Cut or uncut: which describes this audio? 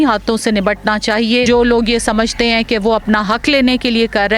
cut